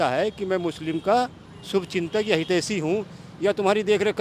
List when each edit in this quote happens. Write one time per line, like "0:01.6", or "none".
none

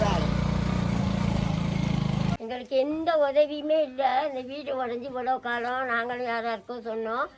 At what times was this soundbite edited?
0:02.3

